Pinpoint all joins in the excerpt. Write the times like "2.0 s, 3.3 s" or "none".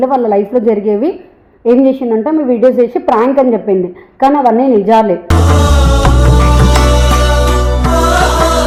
none